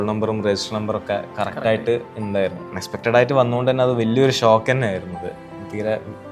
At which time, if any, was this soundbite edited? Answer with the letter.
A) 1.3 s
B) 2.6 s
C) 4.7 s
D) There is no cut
B